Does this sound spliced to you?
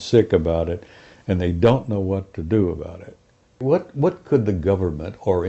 yes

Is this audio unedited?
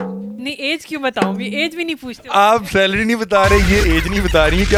yes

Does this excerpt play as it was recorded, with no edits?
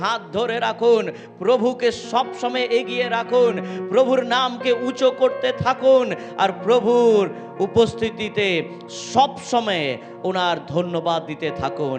yes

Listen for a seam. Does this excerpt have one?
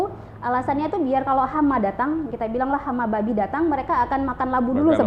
no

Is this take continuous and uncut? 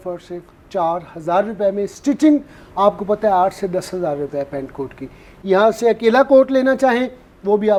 yes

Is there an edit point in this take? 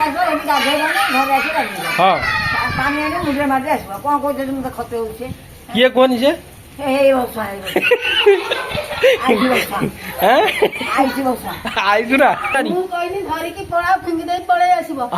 yes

